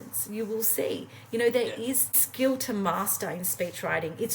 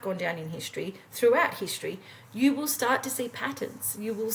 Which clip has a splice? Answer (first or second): first